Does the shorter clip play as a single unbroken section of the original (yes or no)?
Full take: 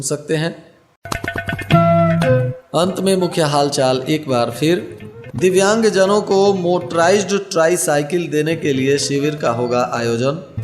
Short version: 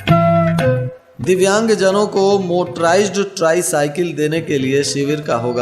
no